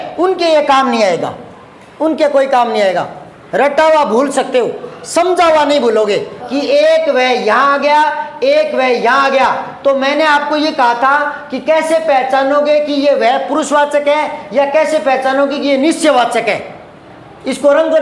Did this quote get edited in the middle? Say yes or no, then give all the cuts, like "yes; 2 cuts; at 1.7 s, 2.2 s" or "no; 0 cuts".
yes; 1 cut; at 6.4 s